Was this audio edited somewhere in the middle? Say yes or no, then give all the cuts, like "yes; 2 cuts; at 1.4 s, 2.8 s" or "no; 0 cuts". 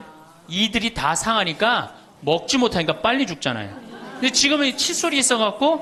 no; 0 cuts